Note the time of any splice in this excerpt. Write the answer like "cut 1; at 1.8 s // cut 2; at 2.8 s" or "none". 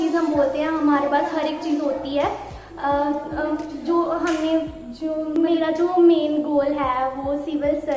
cut 1; at 5.4 s